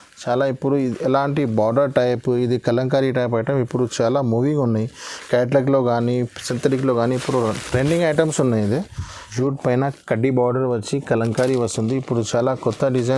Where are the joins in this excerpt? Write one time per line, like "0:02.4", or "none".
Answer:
0:09.3